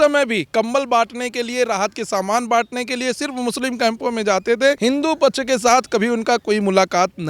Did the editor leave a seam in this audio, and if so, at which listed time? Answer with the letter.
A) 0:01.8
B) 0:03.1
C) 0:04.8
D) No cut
C